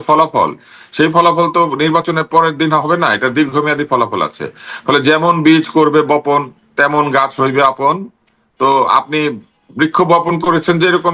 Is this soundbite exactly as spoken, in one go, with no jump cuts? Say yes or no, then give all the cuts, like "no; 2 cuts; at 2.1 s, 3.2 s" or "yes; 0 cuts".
yes; 0 cuts